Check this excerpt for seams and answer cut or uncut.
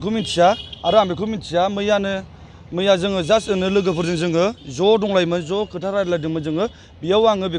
uncut